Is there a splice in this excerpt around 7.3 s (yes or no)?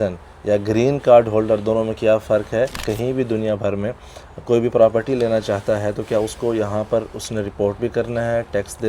no